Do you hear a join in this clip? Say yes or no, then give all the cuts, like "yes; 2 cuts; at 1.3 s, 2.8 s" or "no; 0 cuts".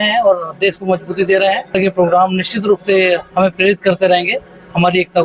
yes; 1 cut; at 1.8 s